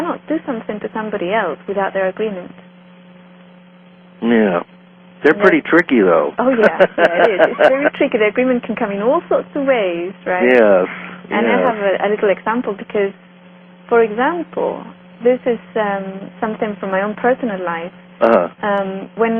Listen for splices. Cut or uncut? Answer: uncut